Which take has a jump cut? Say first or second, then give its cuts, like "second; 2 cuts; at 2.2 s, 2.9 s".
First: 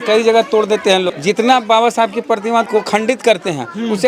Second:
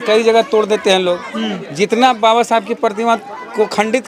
first; 2 cuts; at 1.1 s, 2.7 s